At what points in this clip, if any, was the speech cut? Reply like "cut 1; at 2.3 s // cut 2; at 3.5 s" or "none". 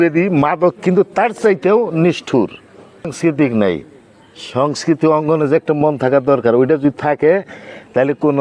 cut 1; at 3.1 s